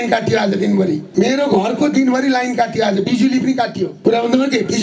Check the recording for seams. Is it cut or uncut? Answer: cut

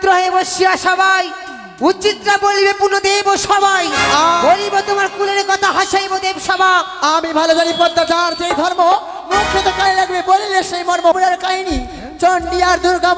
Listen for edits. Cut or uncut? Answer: cut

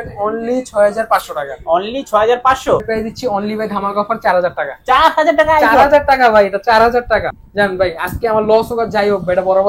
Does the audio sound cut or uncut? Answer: cut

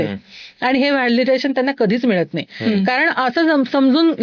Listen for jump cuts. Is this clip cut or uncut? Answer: uncut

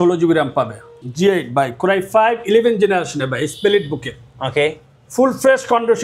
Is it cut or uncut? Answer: cut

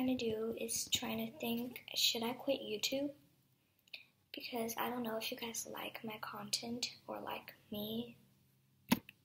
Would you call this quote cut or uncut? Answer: cut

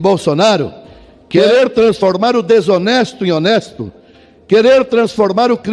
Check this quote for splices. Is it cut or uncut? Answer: cut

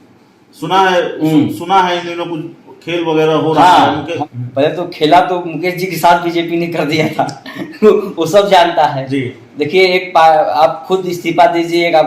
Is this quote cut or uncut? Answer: cut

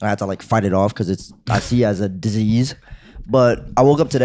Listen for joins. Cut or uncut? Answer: uncut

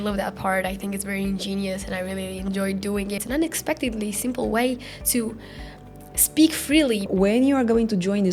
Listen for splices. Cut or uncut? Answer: cut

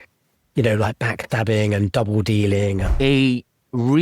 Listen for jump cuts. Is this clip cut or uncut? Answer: cut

